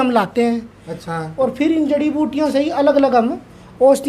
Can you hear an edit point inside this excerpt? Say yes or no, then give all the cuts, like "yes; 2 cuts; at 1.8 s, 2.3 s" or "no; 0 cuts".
yes; 1 cut; at 1.1 s